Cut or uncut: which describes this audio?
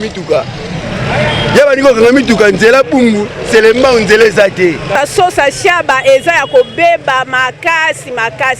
cut